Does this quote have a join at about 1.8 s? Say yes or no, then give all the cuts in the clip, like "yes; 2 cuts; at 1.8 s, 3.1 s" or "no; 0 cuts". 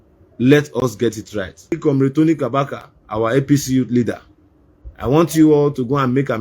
yes; 1 cut; at 1.8 s